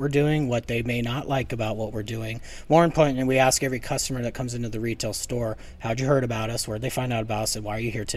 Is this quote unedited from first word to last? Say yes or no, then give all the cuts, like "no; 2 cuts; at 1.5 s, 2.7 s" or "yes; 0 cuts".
yes; 0 cuts